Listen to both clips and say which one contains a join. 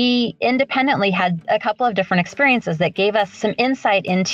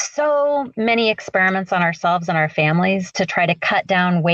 first; 2 cuts; at 1.4 s, 3.3 s

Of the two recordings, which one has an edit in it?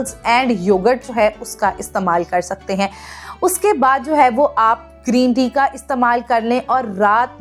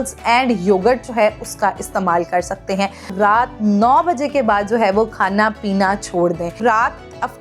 second; 2 cuts; at 3.1 s, 6.6 s

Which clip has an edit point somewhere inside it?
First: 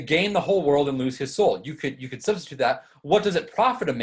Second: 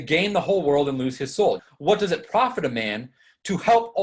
second; 1 cut; at 1.7 s

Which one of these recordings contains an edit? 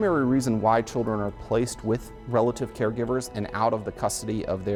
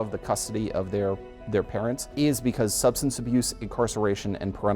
second; 1 cut; at 2.0 s

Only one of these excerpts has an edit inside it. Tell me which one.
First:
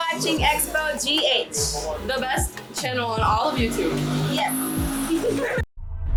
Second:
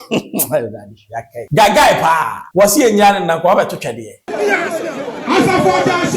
second; 3 cuts; at 1.4 s, 2.4 s, 4.3 s

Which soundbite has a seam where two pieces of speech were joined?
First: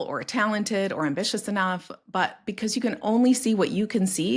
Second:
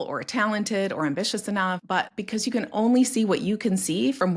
second; 1 cut; at 2.1 s

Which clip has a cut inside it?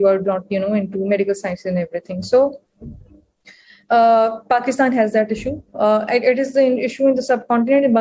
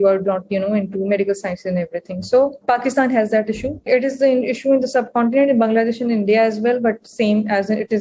second; 2 cuts; at 2.6 s, 3.9 s

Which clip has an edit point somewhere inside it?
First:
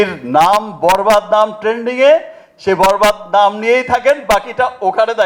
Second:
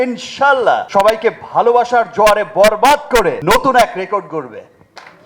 second; 2 cuts; at 0.9 s, 3.4 s

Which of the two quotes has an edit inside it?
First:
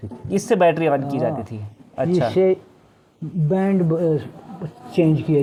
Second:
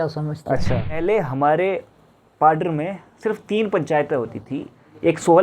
second; 1 cut; at 1.0 s

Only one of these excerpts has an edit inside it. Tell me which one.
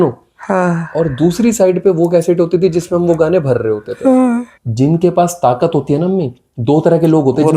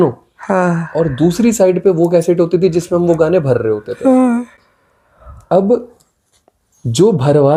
first; 1 cut; at 4.6 s

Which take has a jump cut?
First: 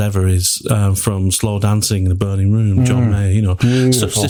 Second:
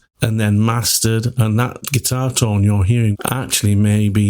second; 2 cuts; at 1.8 s, 3.1 s

